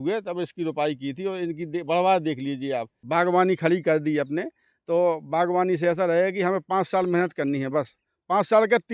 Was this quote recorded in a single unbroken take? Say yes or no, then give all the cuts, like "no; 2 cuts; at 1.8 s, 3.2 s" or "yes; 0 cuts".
no; 1 cut; at 2.9 s